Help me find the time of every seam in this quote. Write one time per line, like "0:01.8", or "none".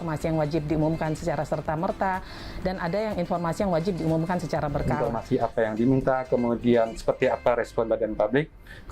0:05.0